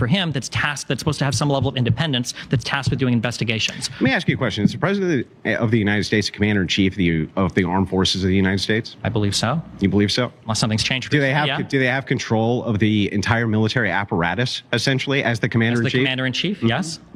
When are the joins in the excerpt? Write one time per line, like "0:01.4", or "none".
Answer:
none